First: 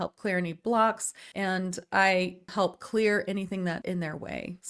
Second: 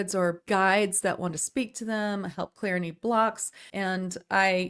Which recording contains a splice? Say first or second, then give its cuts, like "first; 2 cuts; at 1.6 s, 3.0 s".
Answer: first; 1 cut; at 3.8 s